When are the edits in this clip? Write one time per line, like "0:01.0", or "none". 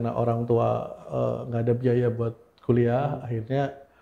none